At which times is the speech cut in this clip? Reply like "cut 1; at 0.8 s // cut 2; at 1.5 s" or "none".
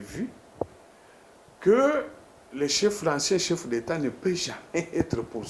none